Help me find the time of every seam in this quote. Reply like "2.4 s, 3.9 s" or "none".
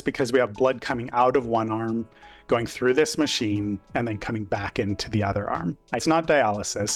6.0 s

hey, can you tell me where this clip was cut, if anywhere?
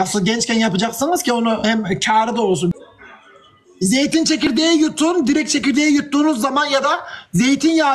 2.7 s

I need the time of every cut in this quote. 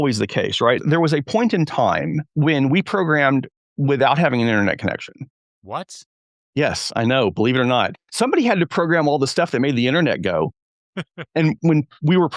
0.8 s, 2.2 s, 5.5 s, 11.6 s

